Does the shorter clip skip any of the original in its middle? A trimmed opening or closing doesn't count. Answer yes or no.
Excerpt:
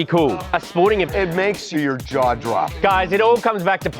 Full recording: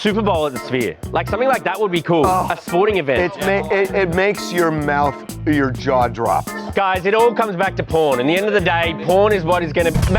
yes